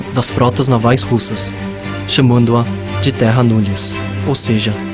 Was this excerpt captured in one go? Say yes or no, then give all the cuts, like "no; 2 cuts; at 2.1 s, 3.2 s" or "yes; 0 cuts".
no; 1 cut; at 3.5 s